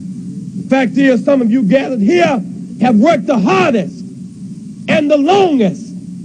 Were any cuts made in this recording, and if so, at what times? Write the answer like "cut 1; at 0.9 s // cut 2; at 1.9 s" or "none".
none

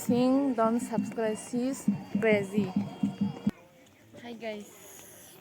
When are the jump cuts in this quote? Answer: cut 1; at 3.5 s

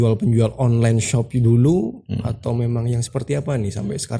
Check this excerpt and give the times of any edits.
none

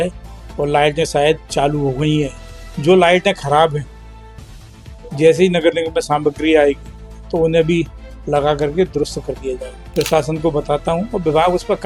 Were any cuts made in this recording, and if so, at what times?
cut 1; at 9.7 s

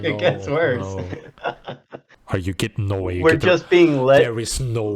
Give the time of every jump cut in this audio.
cut 1; at 2.1 s

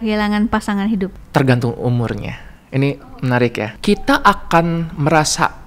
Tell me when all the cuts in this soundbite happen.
cut 1; at 3.7 s

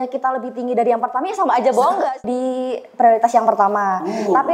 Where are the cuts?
cut 1; at 2.1 s

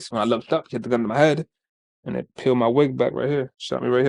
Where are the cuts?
none

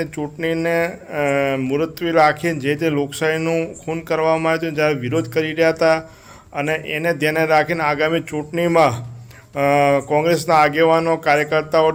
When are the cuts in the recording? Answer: none

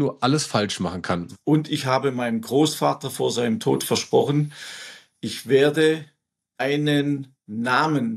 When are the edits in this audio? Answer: cut 1; at 1.3 s

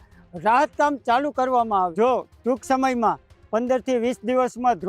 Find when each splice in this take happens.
cut 1; at 1.9 s

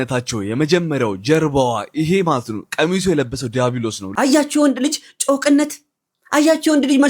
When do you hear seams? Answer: cut 1; at 4.0 s

